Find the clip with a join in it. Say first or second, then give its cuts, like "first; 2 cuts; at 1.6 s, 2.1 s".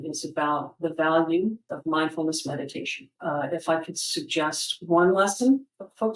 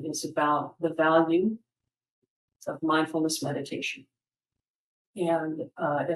first; 2 cuts; at 1.7 s, 3.1 s